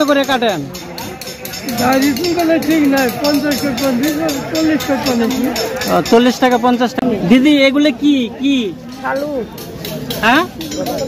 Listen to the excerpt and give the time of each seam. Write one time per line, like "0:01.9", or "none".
0:07.0